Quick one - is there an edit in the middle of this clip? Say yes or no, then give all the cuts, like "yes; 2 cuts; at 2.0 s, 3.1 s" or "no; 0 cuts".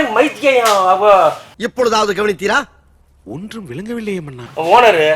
no; 0 cuts